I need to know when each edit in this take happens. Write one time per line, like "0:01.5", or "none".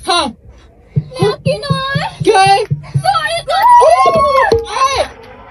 none

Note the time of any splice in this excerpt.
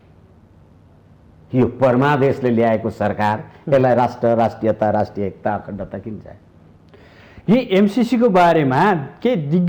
none

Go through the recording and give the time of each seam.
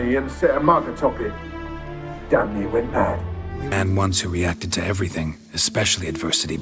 0:03.7

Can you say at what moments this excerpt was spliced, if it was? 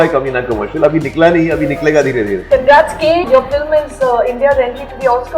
0:02.5
0:03.3

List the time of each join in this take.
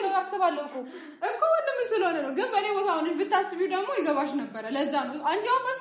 none

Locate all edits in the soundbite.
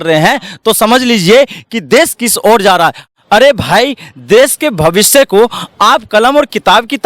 0:03.0

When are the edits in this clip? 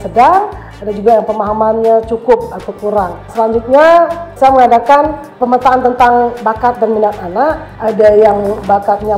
0:03.2
0:04.3
0:05.3
0:07.7

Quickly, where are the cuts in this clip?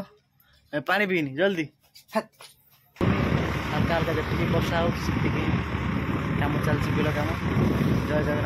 0:03.0

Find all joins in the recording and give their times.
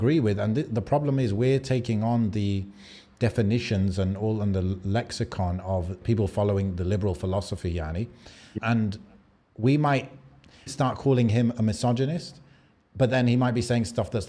0:06.0
0:08.5
0:10.7

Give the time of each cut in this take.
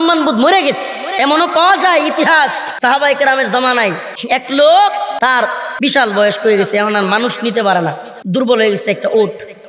0:01.0
0:02.7
0:04.1
0:05.3
0:08.1

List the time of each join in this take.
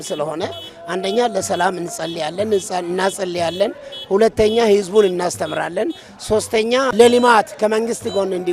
0:06.9

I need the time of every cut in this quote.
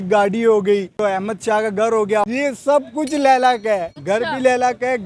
0:01.0
0:02.2
0:03.9

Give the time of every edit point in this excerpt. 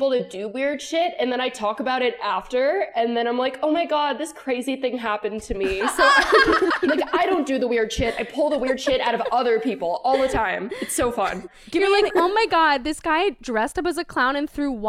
0:06.7

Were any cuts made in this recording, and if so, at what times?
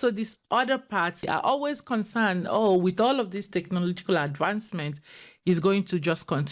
0:01.3

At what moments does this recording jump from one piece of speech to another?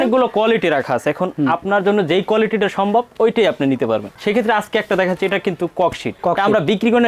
none

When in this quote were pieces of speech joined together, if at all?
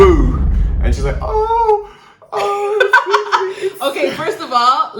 none

